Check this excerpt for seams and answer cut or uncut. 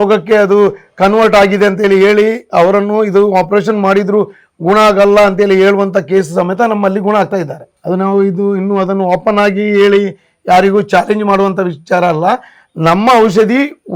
uncut